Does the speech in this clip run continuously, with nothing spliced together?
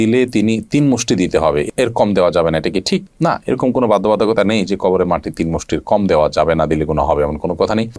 yes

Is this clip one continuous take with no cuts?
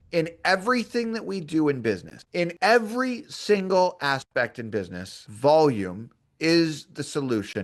yes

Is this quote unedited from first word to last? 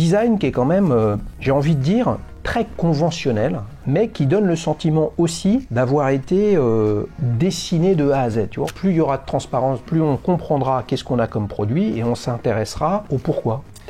no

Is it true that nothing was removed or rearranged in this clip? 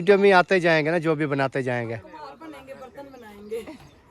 yes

